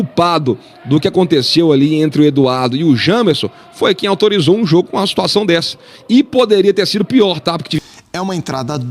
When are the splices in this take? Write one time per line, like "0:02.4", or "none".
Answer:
0:07.8